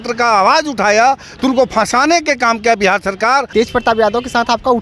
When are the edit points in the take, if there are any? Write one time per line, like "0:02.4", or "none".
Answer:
0:03.5